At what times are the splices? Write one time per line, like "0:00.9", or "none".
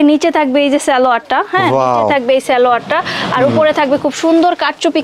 none